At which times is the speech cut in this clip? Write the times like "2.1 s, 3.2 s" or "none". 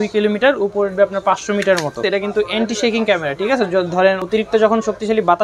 2.0 s, 4.2 s